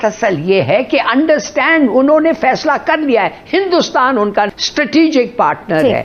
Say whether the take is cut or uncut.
cut